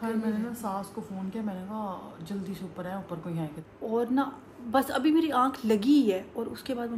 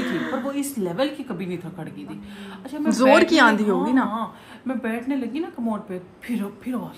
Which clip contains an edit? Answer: first; 1 cut; at 3.6 s

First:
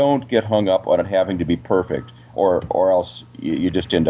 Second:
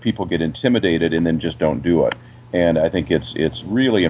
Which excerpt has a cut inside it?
first; 1 cut; at 2.3 s

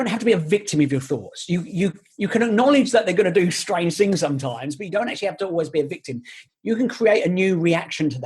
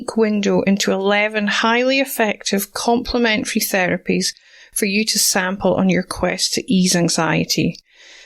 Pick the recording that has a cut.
first; 1 cut; at 6.4 s

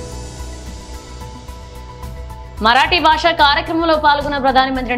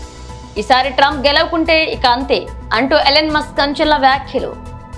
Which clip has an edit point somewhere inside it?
first; 1 cut; at 1.0 s

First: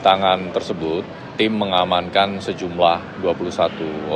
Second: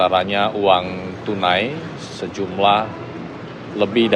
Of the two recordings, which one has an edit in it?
second; 1 cut; at 3.0 s

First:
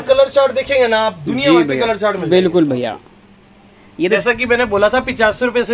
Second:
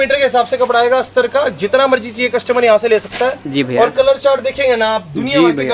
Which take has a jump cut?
first; 1 cut; at 4.2 s

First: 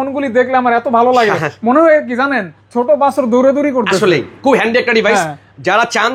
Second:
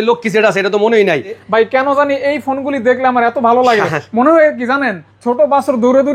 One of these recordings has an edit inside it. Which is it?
second; 1 cut; at 1.4 s

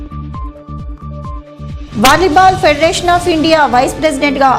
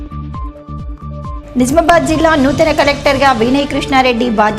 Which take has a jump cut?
second; 1 cut; at 1.4 s

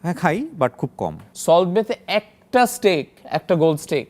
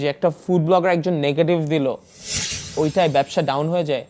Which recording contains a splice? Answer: first; 1 cut; at 1.3 s

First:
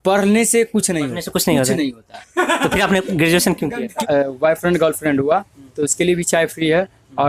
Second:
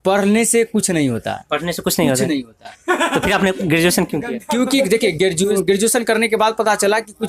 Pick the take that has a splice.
first; 2 cuts; at 1.2 s, 4.0 s

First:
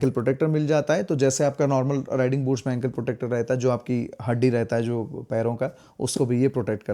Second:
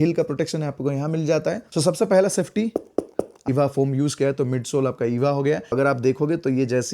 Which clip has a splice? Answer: second; 3 cuts; at 1.6 s, 3.3 s, 5.7 s

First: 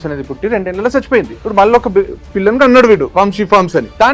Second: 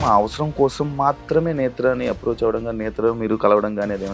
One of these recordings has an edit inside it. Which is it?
first; 3 cuts; at 1.4 s, 2.2 s, 3.4 s

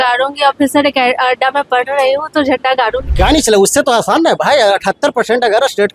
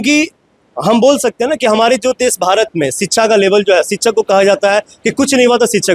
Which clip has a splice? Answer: first; 1 cut; at 3.0 s

